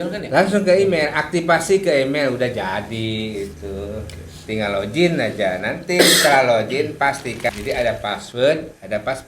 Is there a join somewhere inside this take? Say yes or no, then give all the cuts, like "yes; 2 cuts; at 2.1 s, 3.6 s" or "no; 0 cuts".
yes; 1 cut; at 7.5 s